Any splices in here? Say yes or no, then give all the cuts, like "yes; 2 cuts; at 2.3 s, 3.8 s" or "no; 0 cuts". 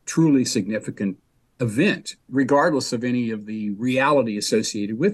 yes; 1 cut; at 2.1 s